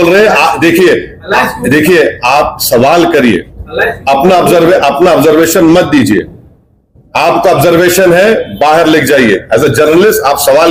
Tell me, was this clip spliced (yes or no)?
no